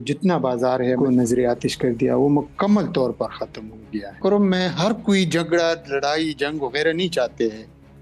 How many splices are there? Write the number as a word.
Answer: two